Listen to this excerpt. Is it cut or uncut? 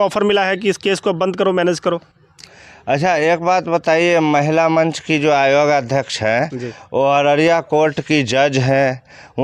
uncut